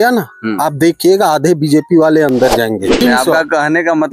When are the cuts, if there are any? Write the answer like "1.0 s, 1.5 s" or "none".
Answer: 3.0 s